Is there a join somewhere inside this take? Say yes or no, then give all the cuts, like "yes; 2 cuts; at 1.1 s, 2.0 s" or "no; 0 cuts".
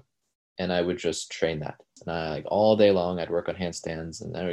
yes; 1 cut; at 1.9 s